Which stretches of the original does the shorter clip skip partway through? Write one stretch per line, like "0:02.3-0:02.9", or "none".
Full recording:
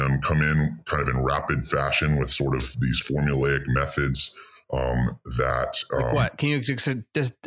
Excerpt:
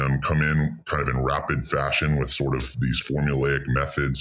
none